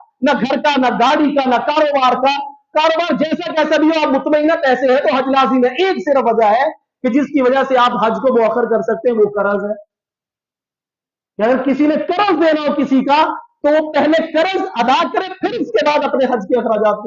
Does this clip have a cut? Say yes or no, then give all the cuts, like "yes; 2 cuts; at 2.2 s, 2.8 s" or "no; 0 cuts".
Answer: no; 0 cuts